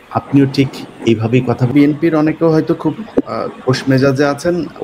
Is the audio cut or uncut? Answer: cut